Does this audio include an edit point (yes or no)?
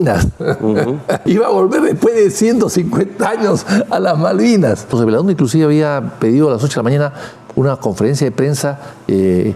yes